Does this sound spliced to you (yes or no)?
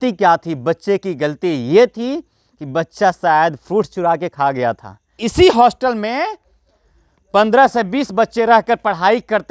yes